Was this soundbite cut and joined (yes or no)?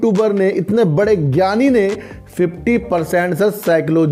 no